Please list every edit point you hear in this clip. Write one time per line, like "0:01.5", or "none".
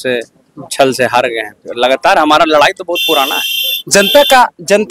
none